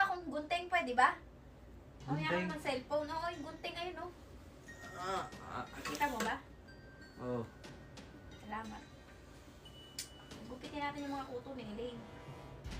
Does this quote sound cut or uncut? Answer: uncut